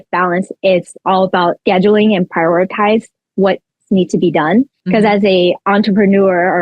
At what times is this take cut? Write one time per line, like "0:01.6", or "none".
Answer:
0:01.6
0:04.8